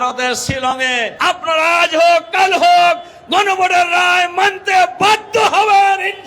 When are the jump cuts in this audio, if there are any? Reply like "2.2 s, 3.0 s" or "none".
1.1 s